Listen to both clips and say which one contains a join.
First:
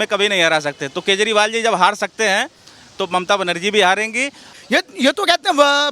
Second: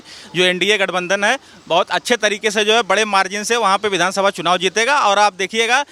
first; 1 cut; at 4.5 s

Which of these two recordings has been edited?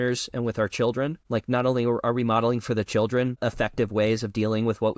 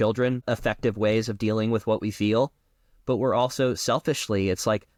first; 1 cut; at 1.2 s

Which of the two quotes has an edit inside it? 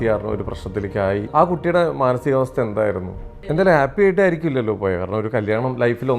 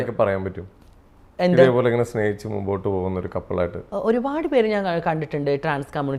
first; 2 cuts; at 1.3 s, 3.5 s

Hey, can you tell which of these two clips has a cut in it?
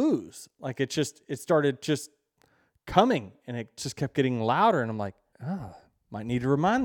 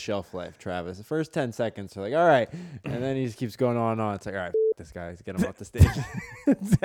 first; 1 cut; at 5.3 s

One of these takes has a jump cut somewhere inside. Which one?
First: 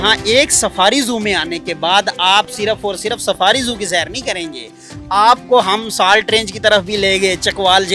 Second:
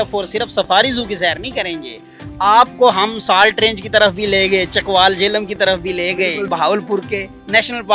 second; 1 cut; at 6.4 s

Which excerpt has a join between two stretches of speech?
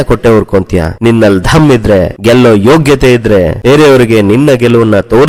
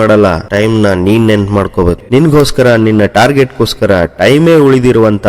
second; 1 cut; at 2.0 s

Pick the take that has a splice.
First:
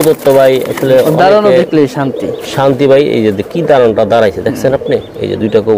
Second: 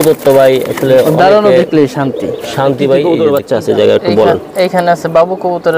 second; 1 cut; at 3.4 s

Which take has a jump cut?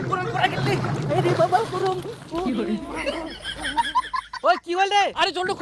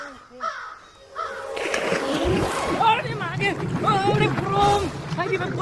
first; 2 cuts; at 2.4 s, 4.3 s

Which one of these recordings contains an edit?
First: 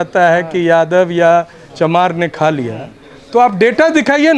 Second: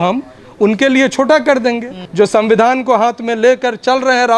second; 1 cut; at 2.0 s

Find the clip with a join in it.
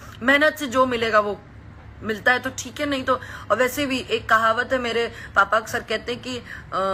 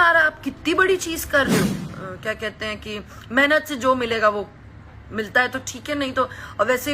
second; 1 cut; at 1.8 s

